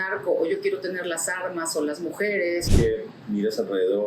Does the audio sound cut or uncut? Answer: cut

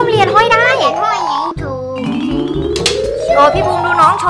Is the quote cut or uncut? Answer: cut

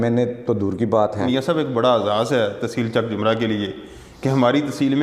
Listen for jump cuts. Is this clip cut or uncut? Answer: cut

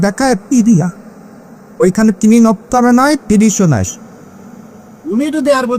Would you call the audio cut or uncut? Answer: uncut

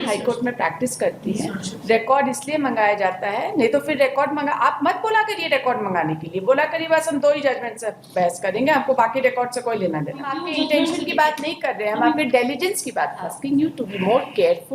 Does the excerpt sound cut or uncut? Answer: cut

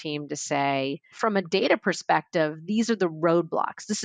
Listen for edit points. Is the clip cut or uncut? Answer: cut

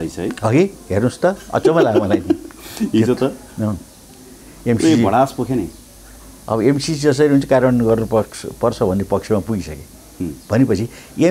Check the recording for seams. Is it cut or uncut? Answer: uncut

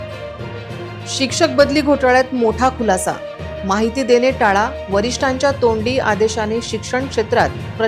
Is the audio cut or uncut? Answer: cut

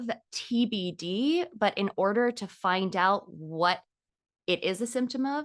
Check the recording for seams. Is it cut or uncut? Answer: uncut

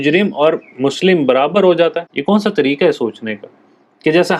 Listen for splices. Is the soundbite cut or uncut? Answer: cut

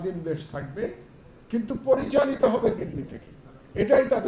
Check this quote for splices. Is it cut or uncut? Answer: uncut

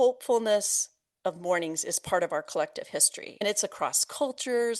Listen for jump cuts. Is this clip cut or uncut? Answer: cut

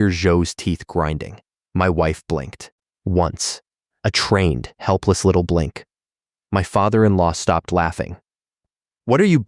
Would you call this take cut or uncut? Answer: uncut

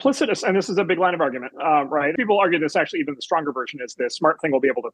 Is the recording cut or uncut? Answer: cut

